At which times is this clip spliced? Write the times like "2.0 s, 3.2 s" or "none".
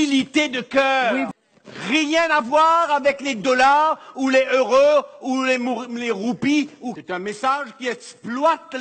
1.3 s, 7.0 s